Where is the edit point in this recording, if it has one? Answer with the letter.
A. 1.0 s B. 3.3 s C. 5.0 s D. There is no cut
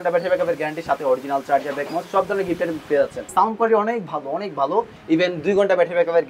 B